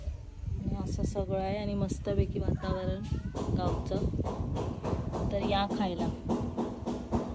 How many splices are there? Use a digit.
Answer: 0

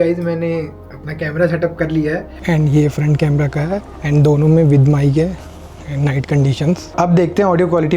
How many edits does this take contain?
3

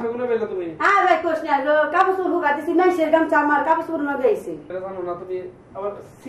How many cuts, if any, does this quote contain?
1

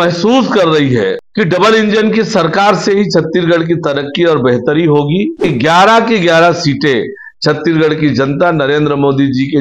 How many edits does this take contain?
2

